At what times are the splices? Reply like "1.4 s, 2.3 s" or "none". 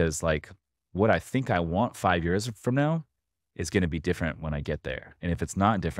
none